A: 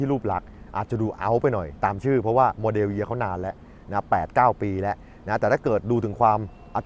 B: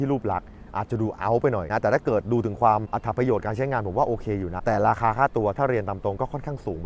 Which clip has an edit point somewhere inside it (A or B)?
B